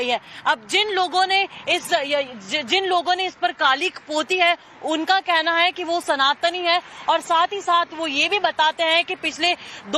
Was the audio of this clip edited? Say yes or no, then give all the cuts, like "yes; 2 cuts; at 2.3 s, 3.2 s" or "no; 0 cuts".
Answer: no; 0 cuts